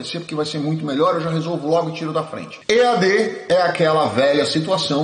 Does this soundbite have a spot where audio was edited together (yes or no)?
yes